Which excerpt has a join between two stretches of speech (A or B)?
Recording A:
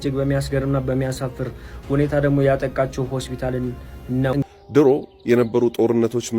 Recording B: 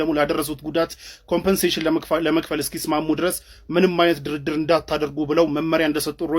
A